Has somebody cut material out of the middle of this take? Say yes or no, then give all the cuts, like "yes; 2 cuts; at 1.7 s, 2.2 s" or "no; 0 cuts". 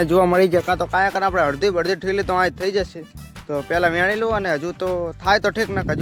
no; 0 cuts